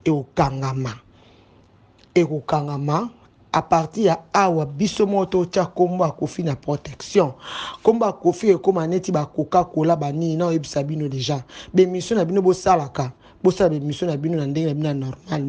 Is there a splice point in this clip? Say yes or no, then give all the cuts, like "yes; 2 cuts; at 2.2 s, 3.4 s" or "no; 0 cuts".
no; 0 cuts